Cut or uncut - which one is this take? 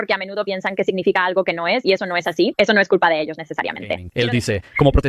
cut